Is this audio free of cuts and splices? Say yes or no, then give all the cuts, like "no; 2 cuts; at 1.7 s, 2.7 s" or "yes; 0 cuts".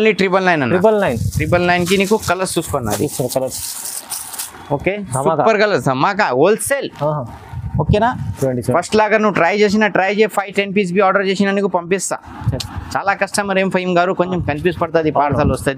yes; 0 cuts